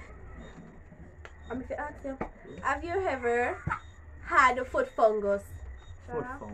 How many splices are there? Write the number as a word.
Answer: one